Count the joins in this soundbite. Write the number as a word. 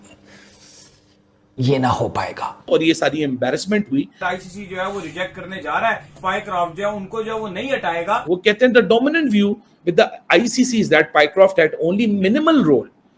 four